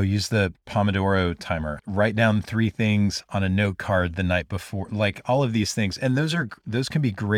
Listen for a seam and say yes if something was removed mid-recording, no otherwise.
no